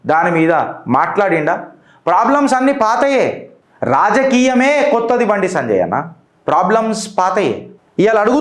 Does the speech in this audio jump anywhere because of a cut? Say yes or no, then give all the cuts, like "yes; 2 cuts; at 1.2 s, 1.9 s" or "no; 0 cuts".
no; 0 cuts